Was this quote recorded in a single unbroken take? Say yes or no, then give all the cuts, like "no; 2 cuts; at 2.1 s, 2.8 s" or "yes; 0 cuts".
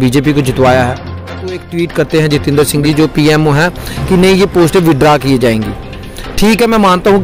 no; 1 cut; at 1.6 s